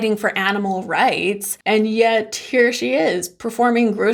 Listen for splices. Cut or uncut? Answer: uncut